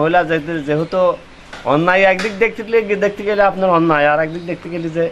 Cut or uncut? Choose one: uncut